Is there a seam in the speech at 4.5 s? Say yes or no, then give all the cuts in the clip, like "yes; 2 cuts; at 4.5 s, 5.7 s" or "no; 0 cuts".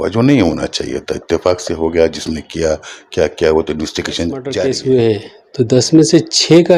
yes; 1 cut; at 4.5 s